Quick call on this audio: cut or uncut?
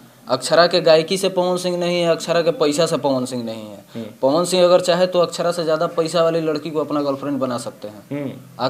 uncut